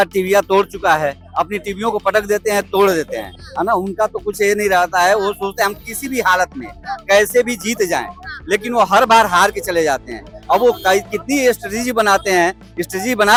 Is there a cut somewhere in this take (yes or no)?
no